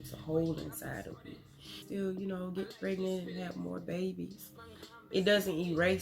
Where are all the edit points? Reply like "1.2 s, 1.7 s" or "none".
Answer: 1.7 s